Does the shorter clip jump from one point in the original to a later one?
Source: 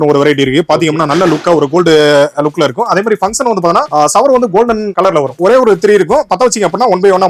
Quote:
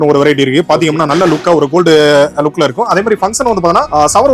no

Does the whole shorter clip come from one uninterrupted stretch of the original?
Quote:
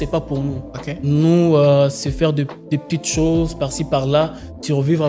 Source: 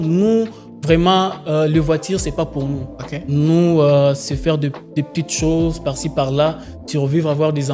yes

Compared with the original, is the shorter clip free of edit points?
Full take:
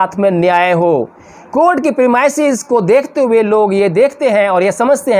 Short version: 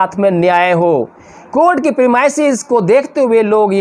yes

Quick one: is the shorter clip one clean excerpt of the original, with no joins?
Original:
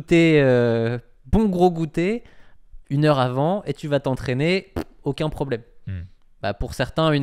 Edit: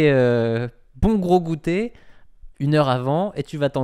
yes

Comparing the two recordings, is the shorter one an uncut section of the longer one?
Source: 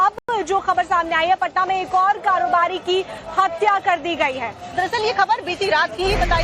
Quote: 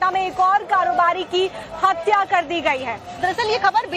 yes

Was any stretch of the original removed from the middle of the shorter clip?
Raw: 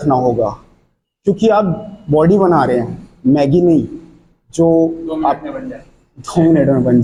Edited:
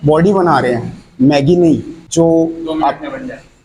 yes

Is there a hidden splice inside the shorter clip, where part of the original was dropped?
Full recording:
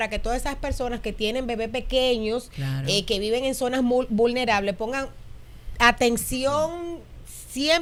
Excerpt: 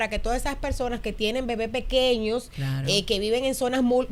no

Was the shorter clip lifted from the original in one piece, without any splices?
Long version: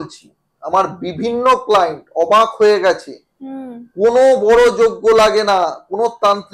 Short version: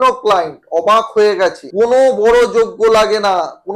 no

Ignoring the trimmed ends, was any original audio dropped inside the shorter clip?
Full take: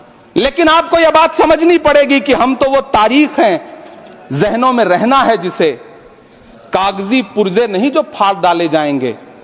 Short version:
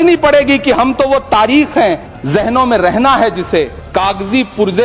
yes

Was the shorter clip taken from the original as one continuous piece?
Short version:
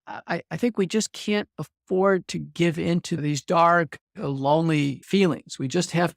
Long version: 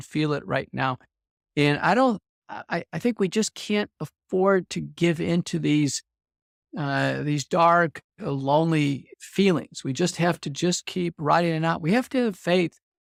no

